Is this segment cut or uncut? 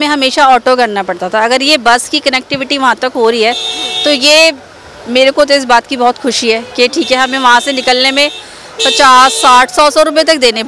uncut